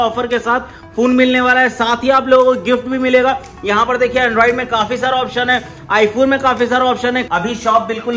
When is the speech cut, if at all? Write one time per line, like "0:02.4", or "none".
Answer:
0:07.2